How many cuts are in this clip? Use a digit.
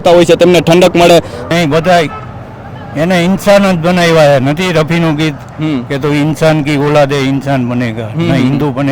1